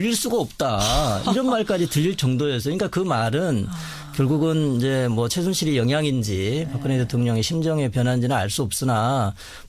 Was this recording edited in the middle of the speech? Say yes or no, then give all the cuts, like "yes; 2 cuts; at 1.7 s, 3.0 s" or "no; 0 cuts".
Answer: yes; 1 cut; at 8.3 s